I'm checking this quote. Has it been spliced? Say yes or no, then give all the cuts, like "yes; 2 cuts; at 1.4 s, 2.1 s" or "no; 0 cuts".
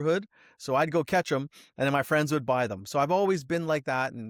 no; 0 cuts